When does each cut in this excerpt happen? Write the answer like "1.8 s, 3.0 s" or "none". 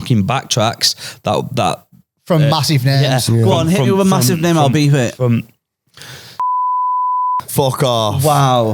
none